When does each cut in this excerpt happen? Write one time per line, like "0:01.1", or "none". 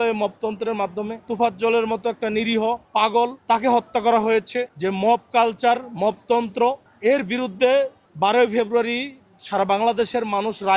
0:01.2
0:03.1
0:04.7
0:06.9
0:08.0

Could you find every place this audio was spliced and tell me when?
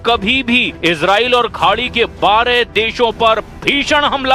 none

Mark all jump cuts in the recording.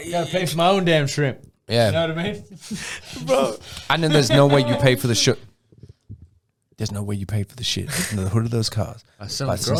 none

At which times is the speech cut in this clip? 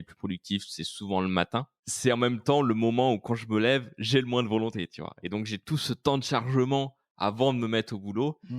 0:01.8

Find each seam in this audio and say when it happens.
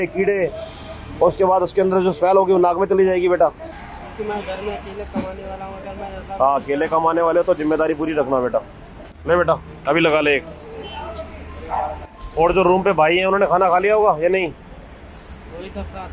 0:03.7
0:12.1

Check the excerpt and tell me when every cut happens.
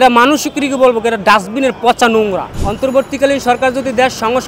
0:02.5

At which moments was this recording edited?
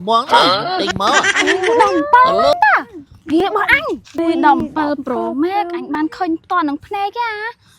0:04.2

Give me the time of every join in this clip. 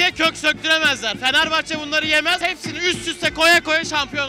0:02.4

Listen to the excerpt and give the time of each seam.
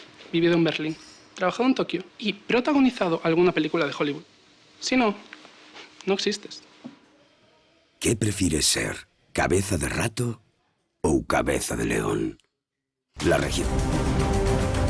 0:13.6

